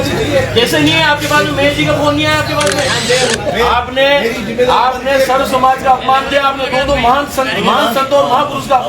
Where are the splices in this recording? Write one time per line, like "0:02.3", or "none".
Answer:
0:03.0